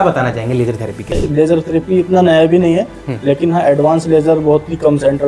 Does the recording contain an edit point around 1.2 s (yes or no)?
yes